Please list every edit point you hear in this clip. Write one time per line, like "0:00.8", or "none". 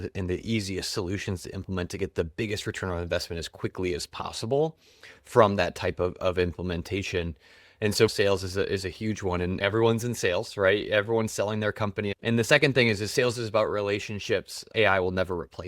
0:08.1
0:09.6
0:12.2
0:14.7